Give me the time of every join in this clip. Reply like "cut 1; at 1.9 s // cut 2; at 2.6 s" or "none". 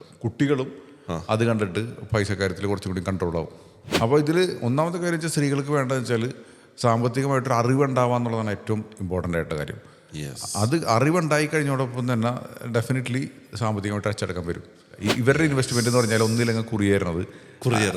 cut 1; at 3.8 s // cut 2; at 15.0 s